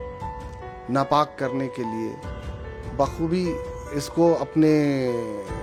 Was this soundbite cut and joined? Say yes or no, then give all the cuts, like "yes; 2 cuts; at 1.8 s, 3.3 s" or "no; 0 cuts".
no; 0 cuts